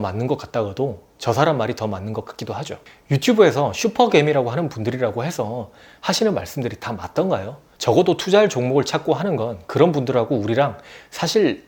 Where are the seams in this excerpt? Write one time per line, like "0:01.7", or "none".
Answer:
none